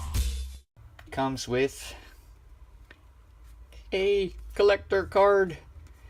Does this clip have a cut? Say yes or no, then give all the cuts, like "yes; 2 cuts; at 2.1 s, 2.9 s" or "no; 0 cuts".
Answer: no; 0 cuts